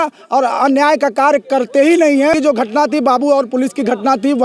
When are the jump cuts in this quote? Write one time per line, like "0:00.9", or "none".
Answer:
0:02.3